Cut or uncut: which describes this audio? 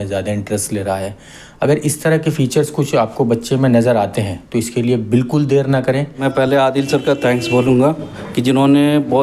cut